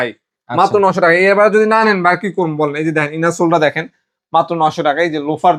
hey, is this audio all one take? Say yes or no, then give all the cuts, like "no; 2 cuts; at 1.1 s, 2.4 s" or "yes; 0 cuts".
yes; 0 cuts